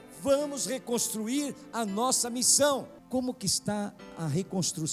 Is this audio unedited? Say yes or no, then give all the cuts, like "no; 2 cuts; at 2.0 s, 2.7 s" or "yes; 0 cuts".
no; 1 cut; at 3.0 s